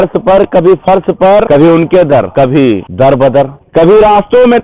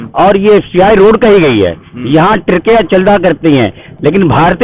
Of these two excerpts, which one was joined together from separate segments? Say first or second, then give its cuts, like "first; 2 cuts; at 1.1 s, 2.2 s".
first; 2 cuts; at 1.5 s, 3.1 s